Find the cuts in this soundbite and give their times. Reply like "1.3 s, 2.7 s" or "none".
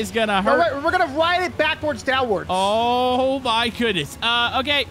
none